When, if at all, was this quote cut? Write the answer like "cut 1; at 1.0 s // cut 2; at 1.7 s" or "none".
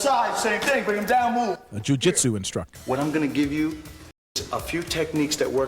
cut 1; at 2.7 s // cut 2; at 4.3 s